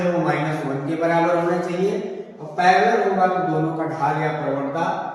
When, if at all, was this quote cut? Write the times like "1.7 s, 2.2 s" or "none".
none